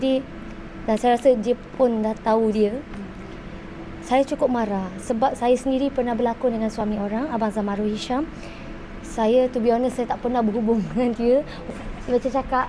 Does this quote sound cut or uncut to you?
cut